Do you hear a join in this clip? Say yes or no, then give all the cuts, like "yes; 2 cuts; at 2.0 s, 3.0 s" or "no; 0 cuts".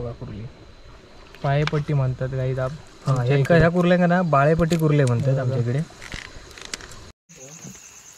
yes; 1 cut; at 7.2 s